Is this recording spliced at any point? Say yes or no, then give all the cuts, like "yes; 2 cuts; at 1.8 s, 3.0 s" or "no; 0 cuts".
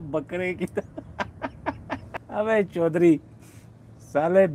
no; 0 cuts